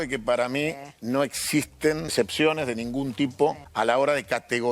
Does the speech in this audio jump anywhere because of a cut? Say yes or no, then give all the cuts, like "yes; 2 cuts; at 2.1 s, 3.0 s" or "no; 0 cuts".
yes; 2 cuts; at 2.1 s, 3.6 s